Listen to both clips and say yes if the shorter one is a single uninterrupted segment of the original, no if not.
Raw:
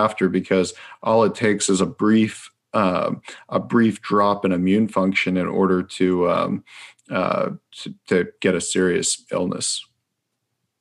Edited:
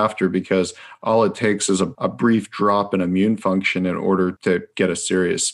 no